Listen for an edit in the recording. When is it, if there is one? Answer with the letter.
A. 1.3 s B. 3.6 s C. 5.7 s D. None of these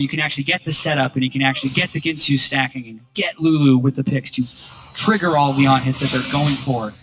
D